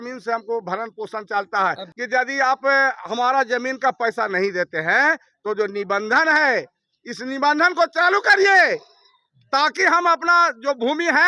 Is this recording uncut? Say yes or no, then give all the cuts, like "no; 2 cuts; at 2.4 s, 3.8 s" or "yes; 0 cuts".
no; 1 cut; at 1.9 s